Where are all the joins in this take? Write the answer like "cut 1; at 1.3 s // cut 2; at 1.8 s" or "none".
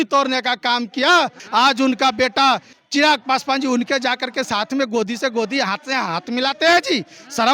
cut 1; at 1.4 s // cut 2; at 2.7 s